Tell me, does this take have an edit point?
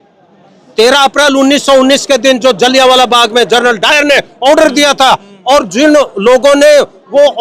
no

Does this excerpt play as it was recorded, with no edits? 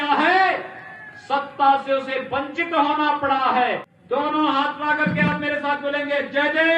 no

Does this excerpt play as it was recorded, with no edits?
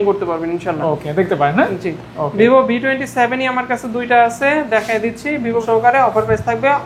no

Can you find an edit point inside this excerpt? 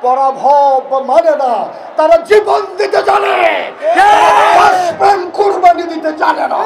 no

